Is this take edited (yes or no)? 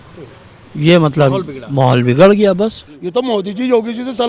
yes